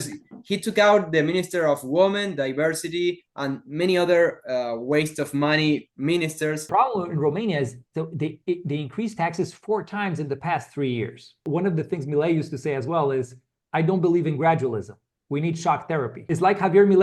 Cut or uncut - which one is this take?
cut